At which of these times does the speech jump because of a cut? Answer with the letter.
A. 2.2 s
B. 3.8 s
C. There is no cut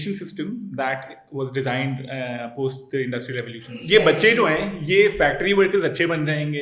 B